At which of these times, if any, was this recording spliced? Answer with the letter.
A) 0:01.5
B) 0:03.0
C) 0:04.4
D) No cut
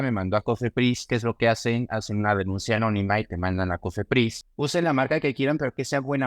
C